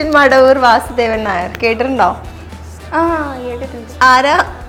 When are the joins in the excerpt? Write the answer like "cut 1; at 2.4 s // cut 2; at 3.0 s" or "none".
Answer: none

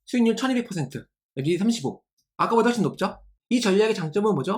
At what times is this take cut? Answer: cut 1; at 3.3 s

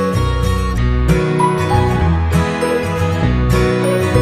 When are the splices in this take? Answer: none

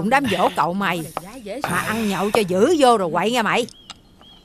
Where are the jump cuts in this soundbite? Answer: none

